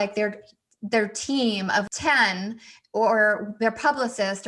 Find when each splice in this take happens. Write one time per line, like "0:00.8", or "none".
0:01.8